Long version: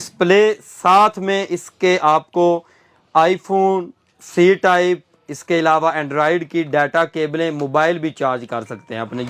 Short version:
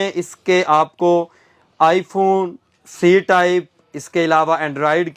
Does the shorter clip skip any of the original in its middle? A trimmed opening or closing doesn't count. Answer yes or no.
no